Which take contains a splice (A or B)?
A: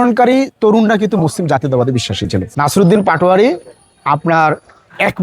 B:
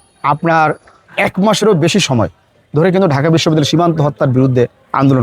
A